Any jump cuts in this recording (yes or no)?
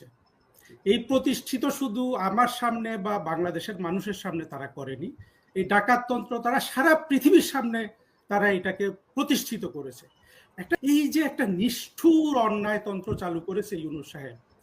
yes